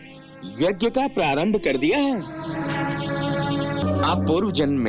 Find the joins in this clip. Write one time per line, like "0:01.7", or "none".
0:03.8